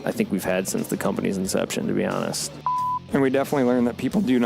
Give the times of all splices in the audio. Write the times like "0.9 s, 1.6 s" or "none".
2.9 s